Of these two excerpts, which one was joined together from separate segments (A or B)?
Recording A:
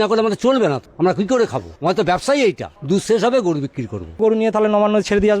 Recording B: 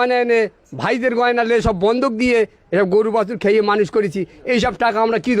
A